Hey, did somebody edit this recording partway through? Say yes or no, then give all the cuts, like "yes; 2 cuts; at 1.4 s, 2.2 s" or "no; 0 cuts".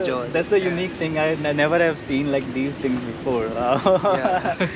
no; 0 cuts